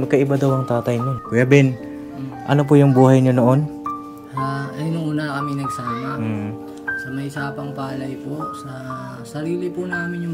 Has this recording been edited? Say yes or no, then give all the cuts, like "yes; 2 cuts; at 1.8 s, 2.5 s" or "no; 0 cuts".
yes; 1 cut; at 1.2 s